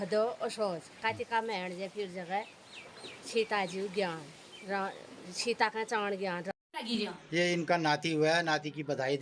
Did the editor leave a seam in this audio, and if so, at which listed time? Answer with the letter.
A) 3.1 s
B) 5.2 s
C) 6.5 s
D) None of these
C